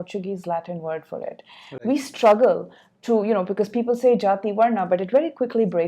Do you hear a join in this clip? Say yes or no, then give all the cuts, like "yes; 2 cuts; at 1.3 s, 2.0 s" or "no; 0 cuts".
no; 0 cuts